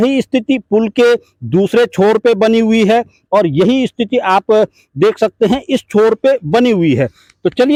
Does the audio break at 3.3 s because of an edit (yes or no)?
no